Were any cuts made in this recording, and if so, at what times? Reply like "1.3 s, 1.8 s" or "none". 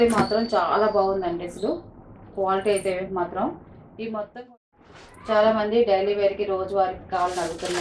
4.4 s